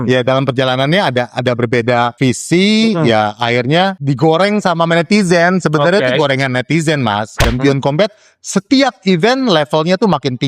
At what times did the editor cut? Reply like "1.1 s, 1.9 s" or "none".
2.1 s, 4.0 s, 7.4 s